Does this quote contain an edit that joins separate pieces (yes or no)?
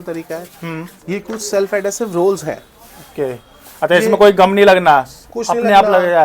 no